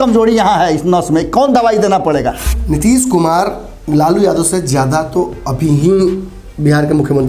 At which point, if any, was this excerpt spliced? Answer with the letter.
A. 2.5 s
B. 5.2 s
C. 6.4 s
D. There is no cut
A